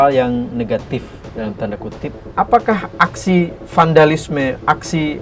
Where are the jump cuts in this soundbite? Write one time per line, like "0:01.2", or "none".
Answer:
0:02.2